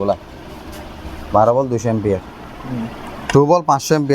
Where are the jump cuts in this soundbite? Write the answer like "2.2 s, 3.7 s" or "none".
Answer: 3.2 s